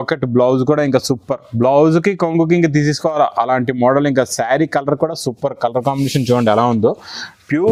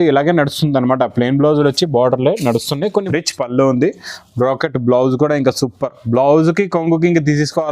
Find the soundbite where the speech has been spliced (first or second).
second